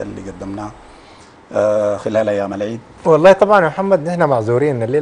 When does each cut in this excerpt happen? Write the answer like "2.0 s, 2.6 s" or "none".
2.9 s